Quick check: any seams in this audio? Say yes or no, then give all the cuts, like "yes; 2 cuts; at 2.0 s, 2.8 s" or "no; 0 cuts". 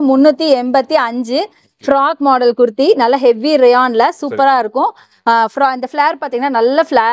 no; 0 cuts